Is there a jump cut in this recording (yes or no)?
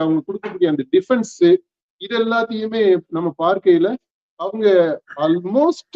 no